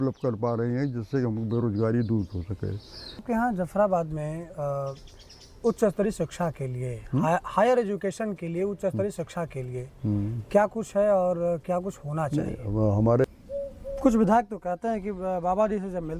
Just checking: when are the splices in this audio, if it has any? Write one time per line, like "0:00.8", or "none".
0:03.2
0:13.2